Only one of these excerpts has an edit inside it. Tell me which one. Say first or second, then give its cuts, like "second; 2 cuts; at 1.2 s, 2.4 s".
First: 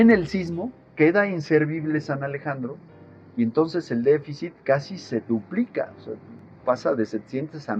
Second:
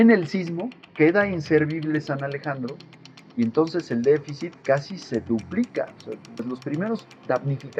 second; 1 cut; at 6.4 s